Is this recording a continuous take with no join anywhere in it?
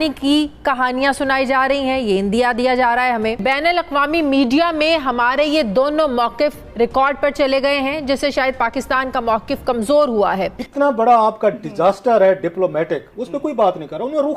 no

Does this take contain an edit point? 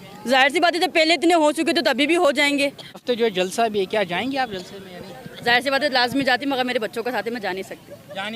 yes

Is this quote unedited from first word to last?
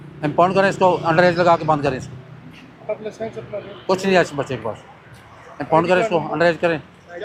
yes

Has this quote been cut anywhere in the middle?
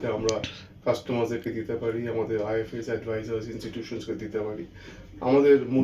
no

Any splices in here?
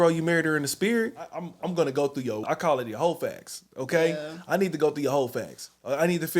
yes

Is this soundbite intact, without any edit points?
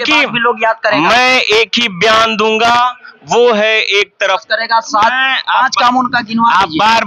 no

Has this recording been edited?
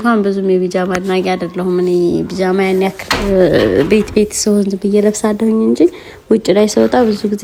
no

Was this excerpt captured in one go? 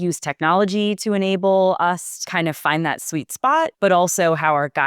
no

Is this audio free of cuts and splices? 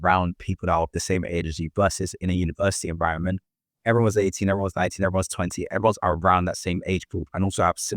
yes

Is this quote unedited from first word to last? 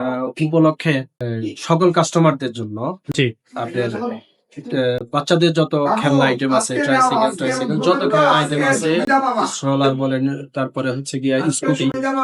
yes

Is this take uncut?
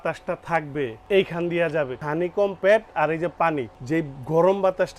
no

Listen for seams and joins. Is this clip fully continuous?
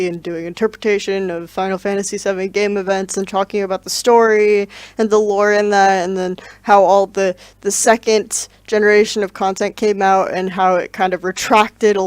no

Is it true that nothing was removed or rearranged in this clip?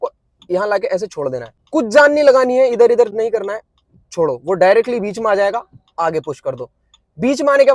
no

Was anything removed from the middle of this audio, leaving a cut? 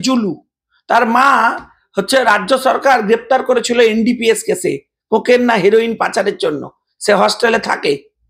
no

